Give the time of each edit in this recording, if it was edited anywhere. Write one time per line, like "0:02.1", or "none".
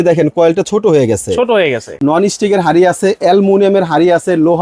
0:01.9